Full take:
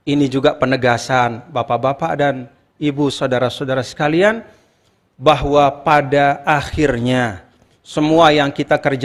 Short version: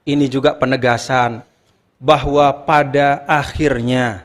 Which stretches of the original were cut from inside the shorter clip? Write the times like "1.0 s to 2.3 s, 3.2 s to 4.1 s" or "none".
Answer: 1.4 s to 4.6 s